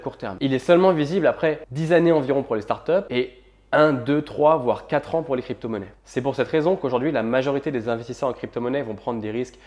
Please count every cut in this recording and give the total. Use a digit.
2